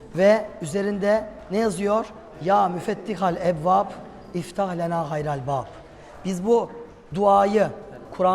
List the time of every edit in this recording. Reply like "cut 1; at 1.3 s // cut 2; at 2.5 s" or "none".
none